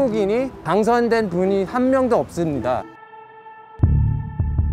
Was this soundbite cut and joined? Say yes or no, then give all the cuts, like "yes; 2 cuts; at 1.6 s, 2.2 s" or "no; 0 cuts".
yes; 1 cut; at 3.0 s